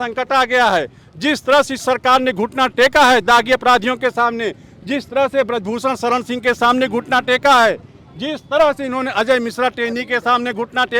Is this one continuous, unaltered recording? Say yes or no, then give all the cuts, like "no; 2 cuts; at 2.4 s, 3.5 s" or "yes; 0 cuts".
yes; 0 cuts